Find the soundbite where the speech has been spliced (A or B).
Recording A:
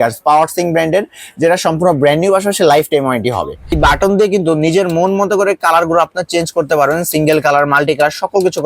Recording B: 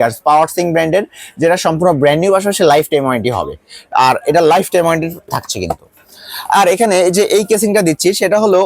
A